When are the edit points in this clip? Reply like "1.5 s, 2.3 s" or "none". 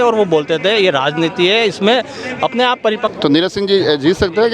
3.1 s